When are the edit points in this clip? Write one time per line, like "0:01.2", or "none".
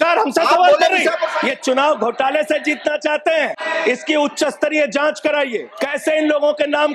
0:01.3
0:03.6
0:05.7